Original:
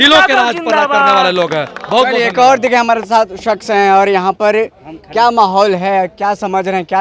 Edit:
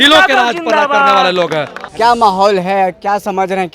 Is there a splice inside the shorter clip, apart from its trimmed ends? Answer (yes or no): yes